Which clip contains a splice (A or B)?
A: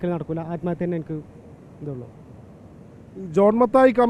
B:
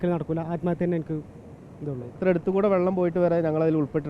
B